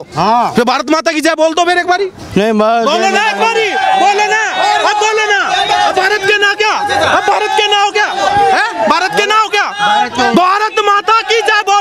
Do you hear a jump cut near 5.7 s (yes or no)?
no